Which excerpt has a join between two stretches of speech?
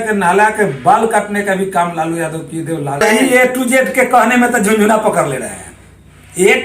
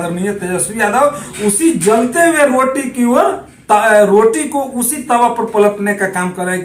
first; 1 cut; at 3.0 s

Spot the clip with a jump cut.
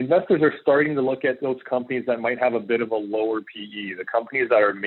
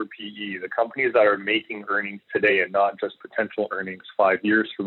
second; 1 cut; at 2.5 s

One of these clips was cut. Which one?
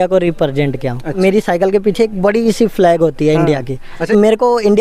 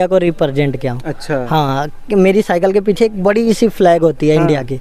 first; 2 cuts; at 1.2 s, 4.0 s

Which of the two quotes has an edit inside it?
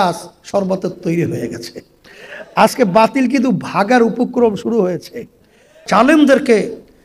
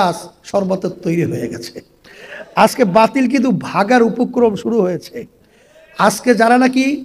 first; 1 cut; at 5.8 s

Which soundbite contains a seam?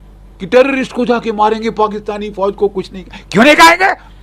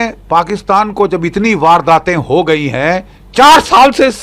second; 1 cut; at 3.2 s

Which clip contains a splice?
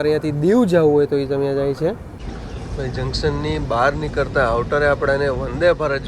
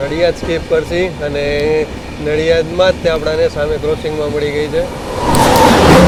first; 1 cut; at 2.3 s

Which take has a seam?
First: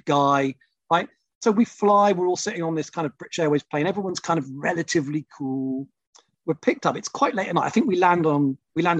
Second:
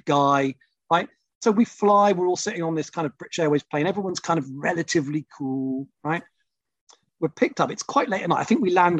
first; 1 cut; at 5.9 s

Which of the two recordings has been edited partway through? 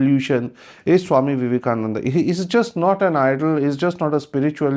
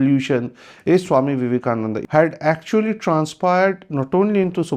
second; 1 cut; at 2.0 s

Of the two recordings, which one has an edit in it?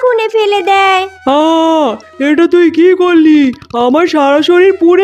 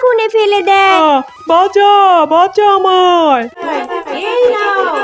second; 2 cuts; at 1.0 s, 3.6 s

